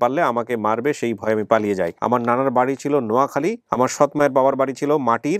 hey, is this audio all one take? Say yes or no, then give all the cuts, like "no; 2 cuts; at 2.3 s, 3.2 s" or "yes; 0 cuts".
no; 2 cuts; at 2.0 s, 3.6 s